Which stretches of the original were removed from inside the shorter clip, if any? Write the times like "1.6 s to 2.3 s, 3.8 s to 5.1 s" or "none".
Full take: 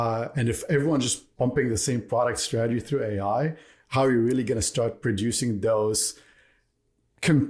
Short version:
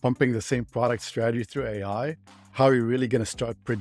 none